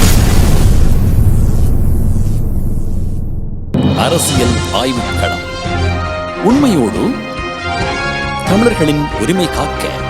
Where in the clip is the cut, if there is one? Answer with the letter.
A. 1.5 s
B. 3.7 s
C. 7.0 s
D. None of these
B